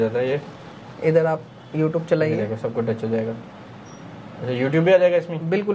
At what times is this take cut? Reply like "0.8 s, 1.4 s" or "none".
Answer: none